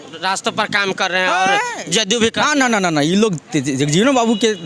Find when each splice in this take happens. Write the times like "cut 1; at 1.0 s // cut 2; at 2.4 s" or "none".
none

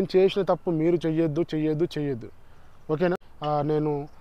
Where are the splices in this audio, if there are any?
cut 1; at 3.3 s

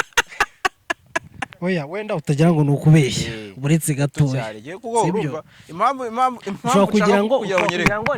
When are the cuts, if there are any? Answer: cut 1; at 1.5 s

